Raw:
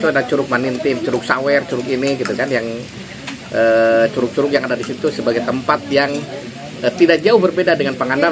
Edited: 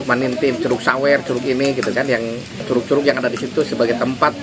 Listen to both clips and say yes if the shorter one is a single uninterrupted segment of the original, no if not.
no